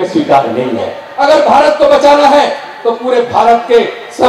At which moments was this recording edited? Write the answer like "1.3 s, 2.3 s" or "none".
1.0 s